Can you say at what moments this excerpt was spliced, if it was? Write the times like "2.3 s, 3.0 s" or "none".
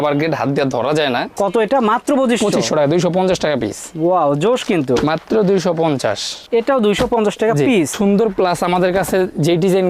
1.3 s, 7.9 s